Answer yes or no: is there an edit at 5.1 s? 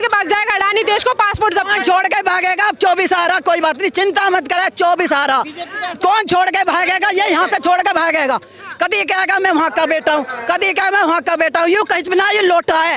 no